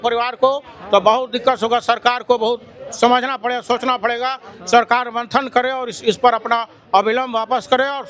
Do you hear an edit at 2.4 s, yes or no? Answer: no